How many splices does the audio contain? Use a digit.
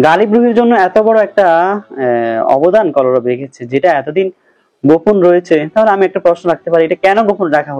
0